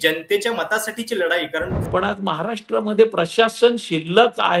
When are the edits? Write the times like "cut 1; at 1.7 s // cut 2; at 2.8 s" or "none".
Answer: cut 1; at 1.8 s